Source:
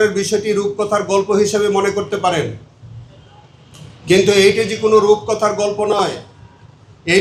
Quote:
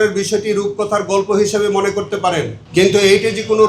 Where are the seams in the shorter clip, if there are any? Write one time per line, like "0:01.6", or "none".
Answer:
0:02.6